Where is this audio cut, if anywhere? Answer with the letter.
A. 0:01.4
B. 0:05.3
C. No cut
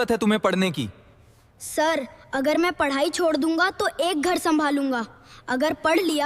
A